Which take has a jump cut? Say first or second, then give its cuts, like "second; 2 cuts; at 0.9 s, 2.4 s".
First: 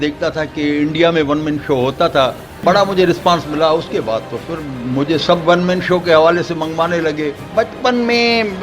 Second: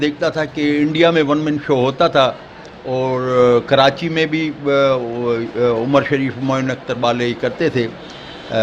first; 2 cuts; at 2.6 s, 7.4 s